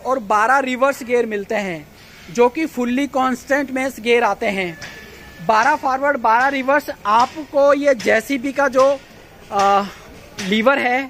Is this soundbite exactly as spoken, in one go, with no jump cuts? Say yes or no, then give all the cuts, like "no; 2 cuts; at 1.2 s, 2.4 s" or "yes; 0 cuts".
yes; 0 cuts